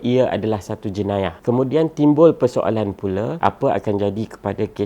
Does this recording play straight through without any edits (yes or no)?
no